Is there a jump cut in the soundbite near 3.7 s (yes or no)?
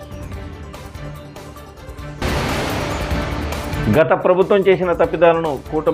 yes